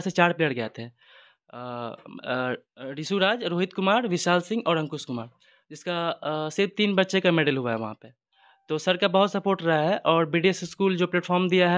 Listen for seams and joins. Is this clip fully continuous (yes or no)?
yes